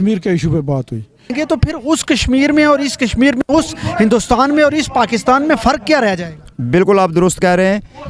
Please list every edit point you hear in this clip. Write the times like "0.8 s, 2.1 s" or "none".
1.3 s